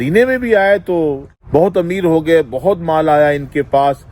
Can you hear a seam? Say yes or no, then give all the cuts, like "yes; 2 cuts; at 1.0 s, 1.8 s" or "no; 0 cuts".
yes; 1 cut; at 1.3 s